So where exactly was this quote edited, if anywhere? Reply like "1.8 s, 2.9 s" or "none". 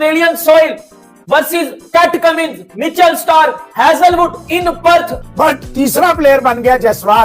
5.1 s